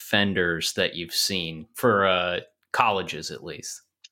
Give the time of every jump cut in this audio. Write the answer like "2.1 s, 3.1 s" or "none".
1.7 s